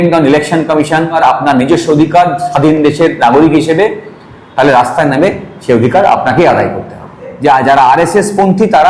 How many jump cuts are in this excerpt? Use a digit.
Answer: 2